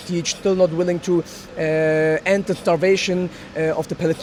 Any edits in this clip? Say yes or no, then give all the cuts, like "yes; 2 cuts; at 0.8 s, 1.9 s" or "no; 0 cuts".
no; 0 cuts